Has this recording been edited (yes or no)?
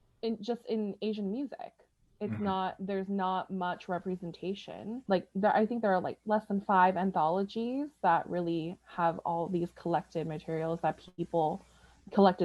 yes